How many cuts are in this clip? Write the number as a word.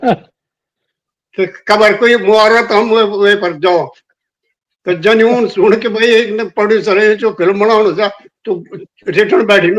zero